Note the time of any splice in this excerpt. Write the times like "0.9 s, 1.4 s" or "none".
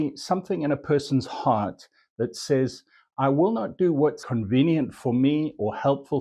4.2 s